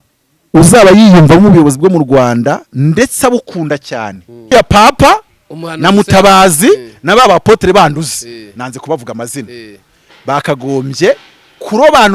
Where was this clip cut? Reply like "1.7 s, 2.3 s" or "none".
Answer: 4.5 s